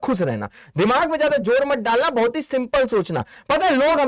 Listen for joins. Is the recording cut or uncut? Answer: uncut